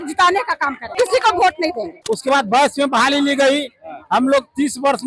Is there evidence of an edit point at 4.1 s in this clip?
no; 2 cuts; at 0.9 s, 1.9 s

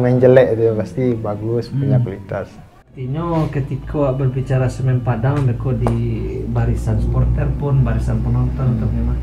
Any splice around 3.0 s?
yes; 1 cut; at 3.0 s

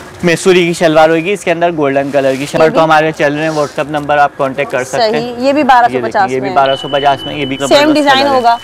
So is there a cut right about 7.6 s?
yes; 2 cuts; at 2.6 s, 7.6 s

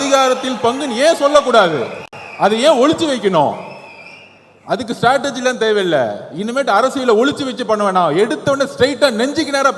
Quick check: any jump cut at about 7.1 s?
no; 0 cuts

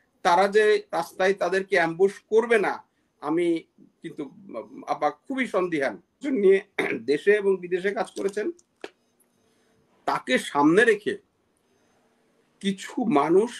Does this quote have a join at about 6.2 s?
yes; 1 cut; at 6.2 s

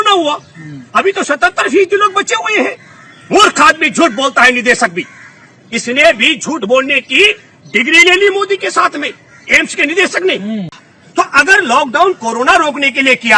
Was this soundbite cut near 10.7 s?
yes; 1 cut; at 10.7 s

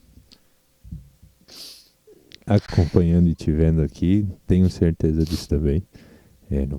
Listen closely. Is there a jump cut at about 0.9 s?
no; 0 cuts

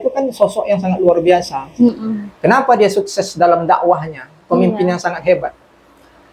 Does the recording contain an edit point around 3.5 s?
no; 0 cuts

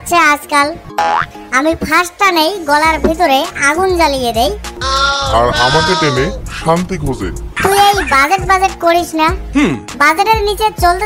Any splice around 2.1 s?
no; 3 cuts; at 0.8 s, 4.8 s, 7.5 s

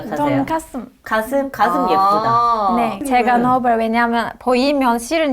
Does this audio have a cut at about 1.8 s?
no; 1 cut; at 3.1 s

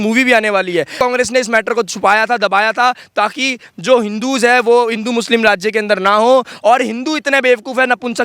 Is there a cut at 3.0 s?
no; 1 cut; at 1.0 s

